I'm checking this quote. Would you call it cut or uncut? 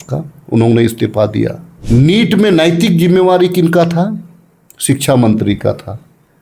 cut